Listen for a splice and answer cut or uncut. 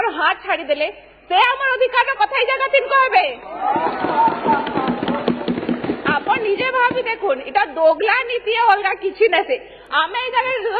uncut